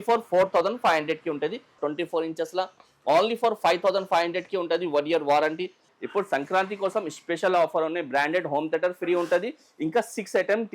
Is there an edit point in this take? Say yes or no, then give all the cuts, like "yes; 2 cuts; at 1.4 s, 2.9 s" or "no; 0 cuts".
yes; 2 cuts; at 1.8 s, 5.8 s